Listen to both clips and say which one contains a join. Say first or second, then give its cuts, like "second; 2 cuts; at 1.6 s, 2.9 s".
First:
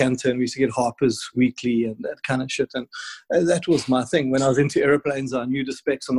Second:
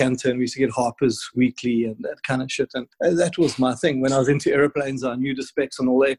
second; 1 cut; at 2.8 s